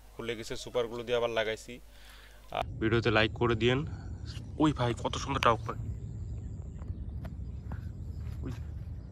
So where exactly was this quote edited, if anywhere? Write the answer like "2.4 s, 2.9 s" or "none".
2.6 s